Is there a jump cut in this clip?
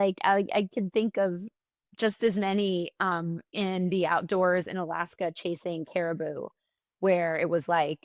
no; 0 cuts

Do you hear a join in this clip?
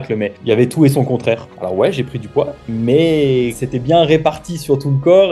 yes; 2 cuts; at 1.5 s, 3.6 s

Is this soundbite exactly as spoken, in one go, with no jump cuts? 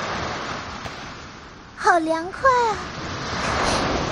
no; 1 cut; at 1.1 s

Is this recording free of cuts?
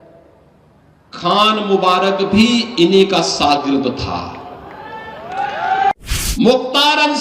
no; 1 cut; at 5.9 s

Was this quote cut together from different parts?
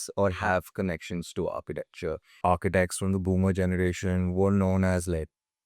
yes; 1 cut; at 2.3 s

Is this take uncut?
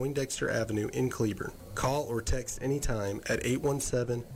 yes; 0 cuts

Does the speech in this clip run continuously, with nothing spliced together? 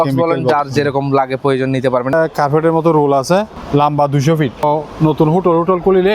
no; 3 cuts; at 2.1 s, 3.6 s, 4.6 s

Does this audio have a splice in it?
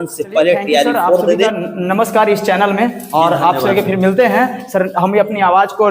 yes; 1 cut; at 1.5 s

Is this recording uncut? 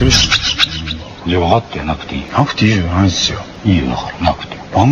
no; 2 cuts; at 2.2 s, 3.5 s

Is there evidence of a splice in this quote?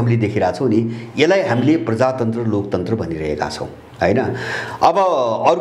no; 0 cuts

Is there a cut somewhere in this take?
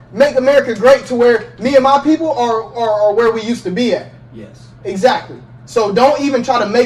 no; 0 cuts

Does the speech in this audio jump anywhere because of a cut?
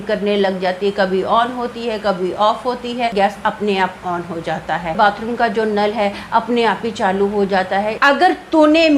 yes; 3 cuts; at 3.1 s, 5.0 s, 8.0 s

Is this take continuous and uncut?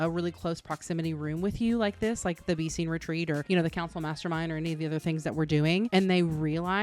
yes; 0 cuts

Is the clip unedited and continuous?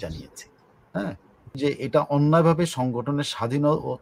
no; 1 cut; at 1.6 s

